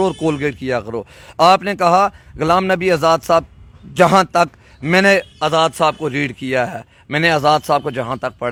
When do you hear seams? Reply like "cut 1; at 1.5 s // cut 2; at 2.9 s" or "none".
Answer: none